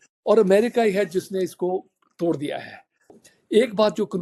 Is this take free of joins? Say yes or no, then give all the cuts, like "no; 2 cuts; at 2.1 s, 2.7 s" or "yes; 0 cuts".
no; 1 cut; at 3.2 s